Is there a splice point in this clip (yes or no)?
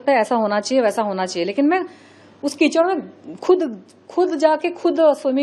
no